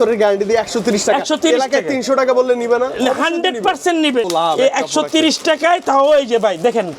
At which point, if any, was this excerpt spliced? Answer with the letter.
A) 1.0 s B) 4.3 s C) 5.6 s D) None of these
B